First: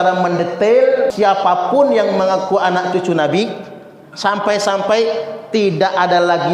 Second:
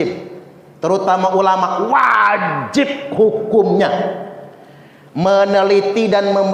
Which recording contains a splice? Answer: first; 1 cut; at 1.1 s

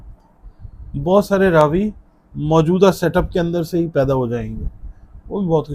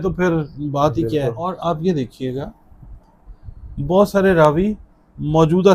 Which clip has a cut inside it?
second; 1 cut; at 1.6 s

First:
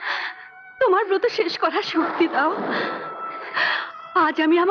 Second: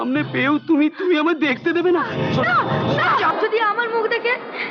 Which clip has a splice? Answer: second; 1 cut; at 3.3 s

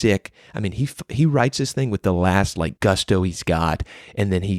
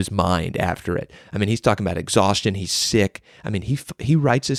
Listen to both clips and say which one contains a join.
first; 1 cut; at 2.7 s

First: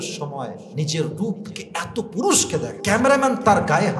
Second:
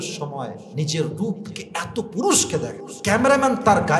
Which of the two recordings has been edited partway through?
first; 1 cut; at 2.8 s

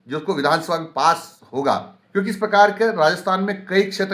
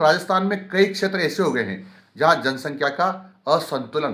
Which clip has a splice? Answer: first; 1 cut; at 2.0 s

